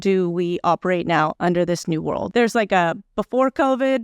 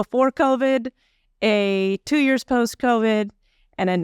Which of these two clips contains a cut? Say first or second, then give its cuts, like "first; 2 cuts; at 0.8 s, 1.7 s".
first; 2 cuts; at 1.3 s, 2.3 s